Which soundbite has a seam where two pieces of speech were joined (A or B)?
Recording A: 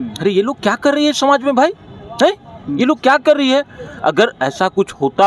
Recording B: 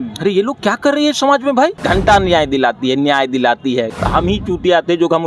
B